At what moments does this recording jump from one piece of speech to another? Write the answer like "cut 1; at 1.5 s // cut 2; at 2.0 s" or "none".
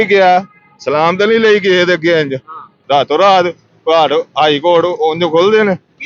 cut 1; at 2.7 s